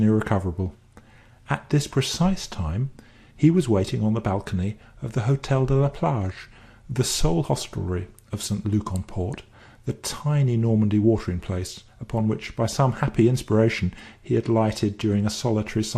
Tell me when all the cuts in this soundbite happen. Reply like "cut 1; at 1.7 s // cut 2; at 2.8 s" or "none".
cut 1; at 11.4 s